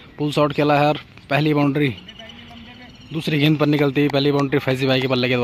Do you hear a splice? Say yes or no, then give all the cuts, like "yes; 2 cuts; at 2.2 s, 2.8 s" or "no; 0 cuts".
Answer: no; 0 cuts